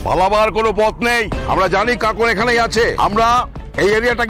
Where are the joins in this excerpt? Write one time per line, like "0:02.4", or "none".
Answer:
0:01.4
0:03.0

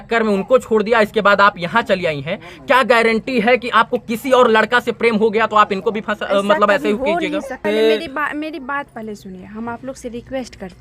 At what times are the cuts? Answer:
0:07.6

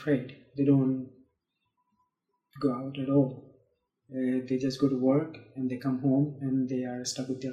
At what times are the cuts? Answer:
none

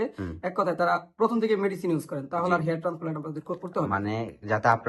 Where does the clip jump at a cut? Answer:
none

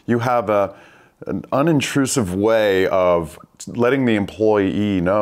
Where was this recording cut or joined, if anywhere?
none

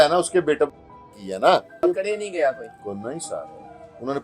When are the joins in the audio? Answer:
0:01.8

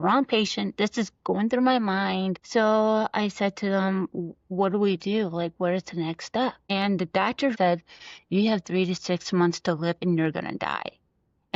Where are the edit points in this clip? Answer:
0:02.4
0:06.6
0:07.5

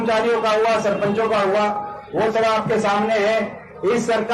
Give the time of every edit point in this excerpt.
none

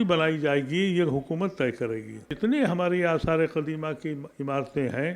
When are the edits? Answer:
0:02.3

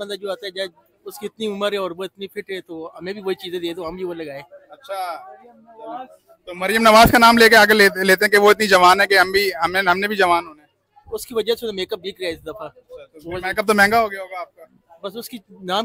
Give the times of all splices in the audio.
none

